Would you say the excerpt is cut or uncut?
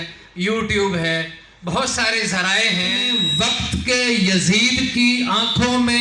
cut